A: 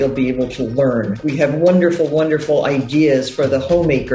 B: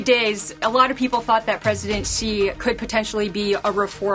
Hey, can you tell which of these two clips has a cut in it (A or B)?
A